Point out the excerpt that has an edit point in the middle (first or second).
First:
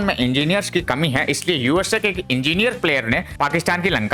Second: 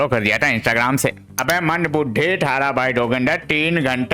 second